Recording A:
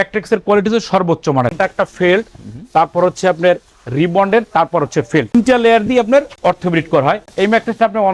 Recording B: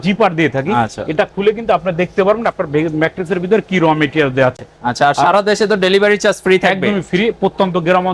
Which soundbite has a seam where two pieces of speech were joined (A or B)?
A